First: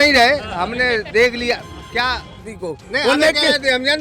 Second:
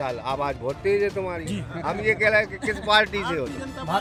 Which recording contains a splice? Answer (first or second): first